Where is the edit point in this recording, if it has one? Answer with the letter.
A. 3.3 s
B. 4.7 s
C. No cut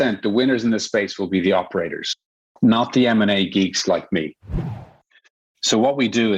B